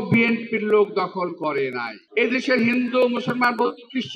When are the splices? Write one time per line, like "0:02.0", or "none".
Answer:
0:01.9